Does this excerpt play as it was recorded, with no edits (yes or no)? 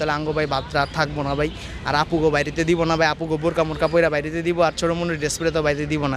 yes